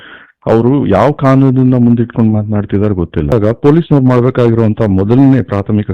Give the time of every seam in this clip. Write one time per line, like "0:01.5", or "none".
0:03.3